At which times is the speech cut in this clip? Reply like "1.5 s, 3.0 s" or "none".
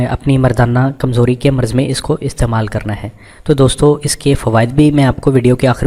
3.3 s